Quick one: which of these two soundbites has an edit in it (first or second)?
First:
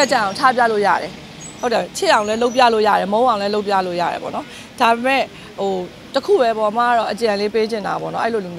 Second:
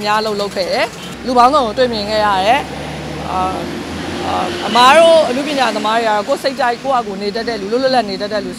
second